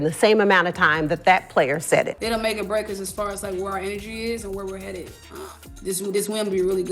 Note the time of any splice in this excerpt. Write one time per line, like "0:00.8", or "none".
0:02.2